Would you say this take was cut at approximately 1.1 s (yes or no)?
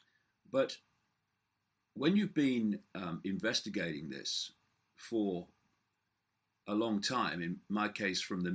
no